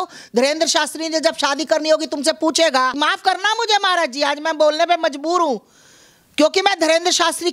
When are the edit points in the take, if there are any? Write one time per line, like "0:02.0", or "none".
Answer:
0:03.0